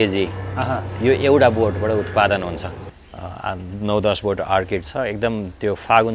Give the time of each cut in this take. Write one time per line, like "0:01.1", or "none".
0:02.7